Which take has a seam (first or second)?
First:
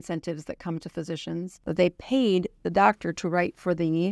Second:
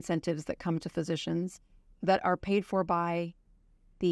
first